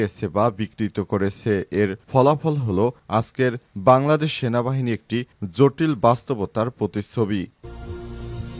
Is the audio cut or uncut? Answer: cut